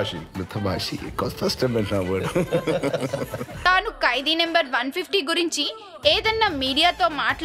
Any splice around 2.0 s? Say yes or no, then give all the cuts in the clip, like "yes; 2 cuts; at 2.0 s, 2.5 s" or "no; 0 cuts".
yes; 1 cut; at 2.0 s